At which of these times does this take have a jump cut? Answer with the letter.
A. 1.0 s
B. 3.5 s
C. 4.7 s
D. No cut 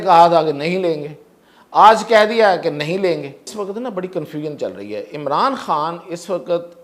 B